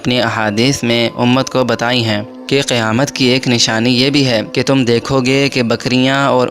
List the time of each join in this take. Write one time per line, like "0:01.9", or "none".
0:02.3
0:04.5